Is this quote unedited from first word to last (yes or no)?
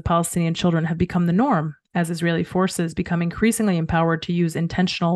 yes